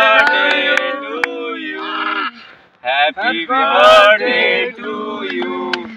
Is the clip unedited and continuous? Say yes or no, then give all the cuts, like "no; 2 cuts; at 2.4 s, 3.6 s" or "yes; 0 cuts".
yes; 0 cuts